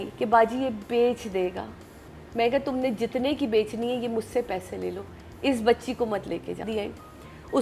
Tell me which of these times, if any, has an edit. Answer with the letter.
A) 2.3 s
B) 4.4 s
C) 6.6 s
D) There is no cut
C